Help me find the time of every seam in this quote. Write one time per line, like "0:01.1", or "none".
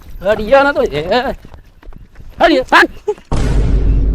0:03.2